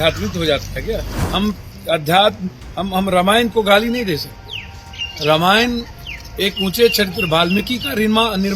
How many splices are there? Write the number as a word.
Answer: one